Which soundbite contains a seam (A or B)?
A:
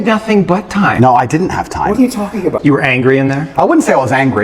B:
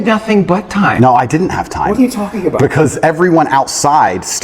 A